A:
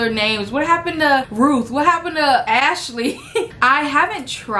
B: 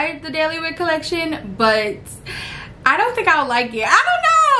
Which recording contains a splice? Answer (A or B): A